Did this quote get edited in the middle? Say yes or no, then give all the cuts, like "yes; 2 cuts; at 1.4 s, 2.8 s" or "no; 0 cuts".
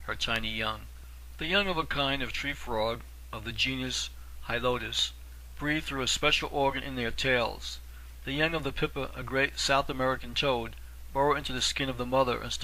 no; 0 cuts